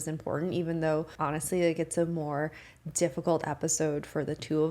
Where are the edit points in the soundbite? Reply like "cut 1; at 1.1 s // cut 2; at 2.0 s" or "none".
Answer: cut 1; at 1.1 s